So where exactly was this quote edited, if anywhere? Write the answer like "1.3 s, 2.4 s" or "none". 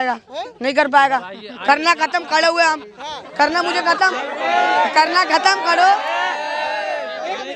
none